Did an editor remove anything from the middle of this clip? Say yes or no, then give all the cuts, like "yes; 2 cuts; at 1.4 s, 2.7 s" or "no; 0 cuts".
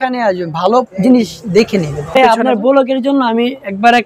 yes; 1 cut; at 2.2 s